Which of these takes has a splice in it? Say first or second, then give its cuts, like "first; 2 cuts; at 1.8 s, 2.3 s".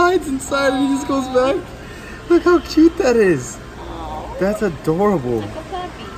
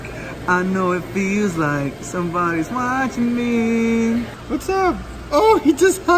second; 1 cut; at 4.4 s